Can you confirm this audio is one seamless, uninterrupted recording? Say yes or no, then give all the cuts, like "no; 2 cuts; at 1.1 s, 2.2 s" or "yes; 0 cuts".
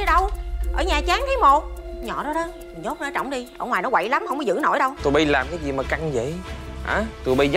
no; 1 cut; at 5.0 s